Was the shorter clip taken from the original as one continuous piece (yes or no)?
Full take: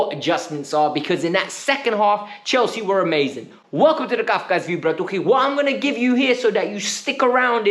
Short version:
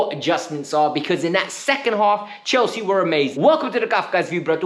no